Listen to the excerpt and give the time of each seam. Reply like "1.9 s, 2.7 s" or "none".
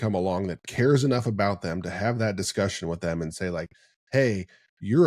none